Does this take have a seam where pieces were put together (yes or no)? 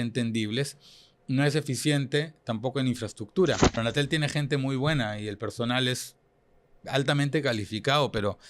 yes